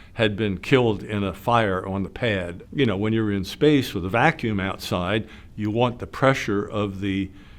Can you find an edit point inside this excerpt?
yes; 1 cut; at 2.6 s

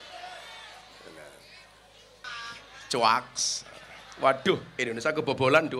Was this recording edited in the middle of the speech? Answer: yes; 1 cut; at 2.2 s

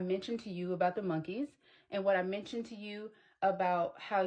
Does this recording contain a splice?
no; 0 cuts

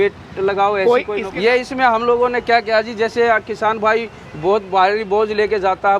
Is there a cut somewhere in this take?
yes; 1 cut; at 1.2 s

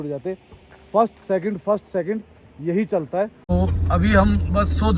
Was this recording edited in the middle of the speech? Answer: yes; 1 cut; at 3.4 s

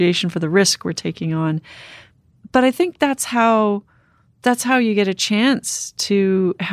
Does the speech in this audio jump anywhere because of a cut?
no; 0 cuts

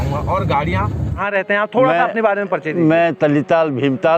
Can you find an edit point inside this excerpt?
yes; 1 cut; at 1.2 s

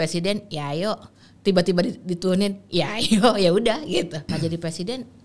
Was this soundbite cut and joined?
yes; 1 cut; at 4.2 s

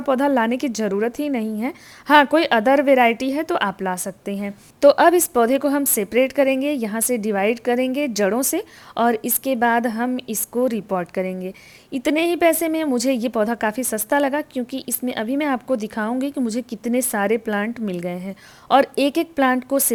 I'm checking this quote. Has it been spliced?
no; 0 cuts

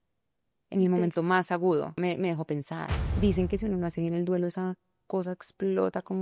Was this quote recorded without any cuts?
no; 2 cuts; at 2.0 s, 3.0 s

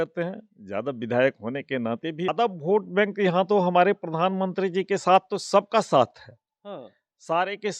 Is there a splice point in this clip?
yes; 1 cut; at 2.3 s

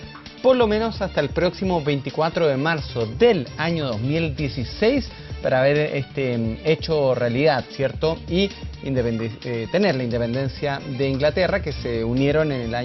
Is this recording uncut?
no; 1 cut; at 11.7 s

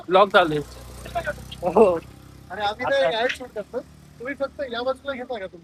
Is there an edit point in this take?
no; 0 cuts

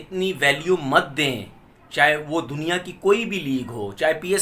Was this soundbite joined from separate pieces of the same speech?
no; 0 cuts

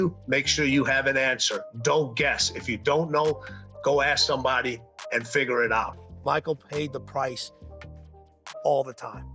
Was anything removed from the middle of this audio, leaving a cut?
yes; 1 cut; at 6.0 s

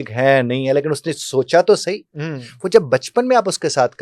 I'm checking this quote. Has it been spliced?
no; 0 cuts

